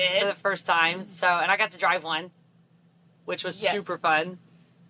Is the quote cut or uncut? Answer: uncut